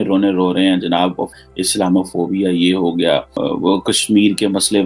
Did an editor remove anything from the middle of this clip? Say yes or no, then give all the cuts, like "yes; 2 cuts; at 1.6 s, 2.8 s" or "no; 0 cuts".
yes; 2 cuts; at 1.3 s, 3.4 s